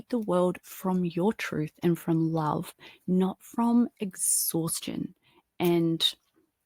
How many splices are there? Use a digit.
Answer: 0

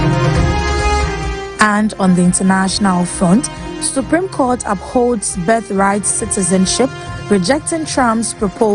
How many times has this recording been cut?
1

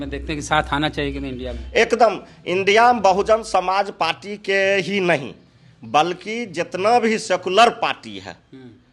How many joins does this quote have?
0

